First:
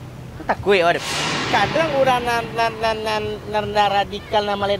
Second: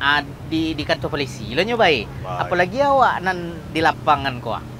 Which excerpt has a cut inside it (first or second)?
first